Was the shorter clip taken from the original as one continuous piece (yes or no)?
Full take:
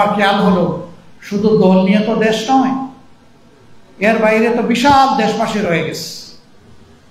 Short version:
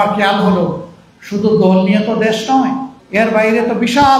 no